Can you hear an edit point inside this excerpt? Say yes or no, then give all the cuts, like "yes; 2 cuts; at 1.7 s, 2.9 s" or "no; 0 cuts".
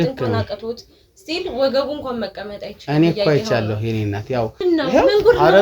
yes; 1 cut; at 4.6 s